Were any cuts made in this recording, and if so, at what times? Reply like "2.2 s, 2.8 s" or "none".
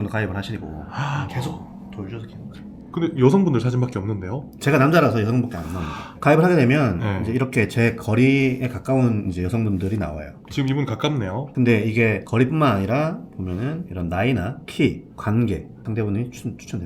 11.5 s, 15.8 s